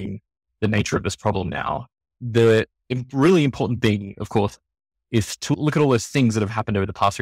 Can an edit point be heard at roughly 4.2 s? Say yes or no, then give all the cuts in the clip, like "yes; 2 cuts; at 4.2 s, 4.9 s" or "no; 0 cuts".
no; 2 cuts; at 2.2 s, 5.5 s